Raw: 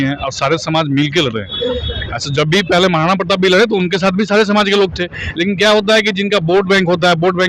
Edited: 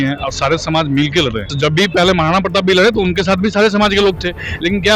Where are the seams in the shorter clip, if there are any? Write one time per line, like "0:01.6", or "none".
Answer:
0:01.5